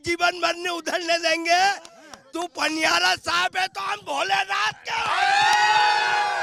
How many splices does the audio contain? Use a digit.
0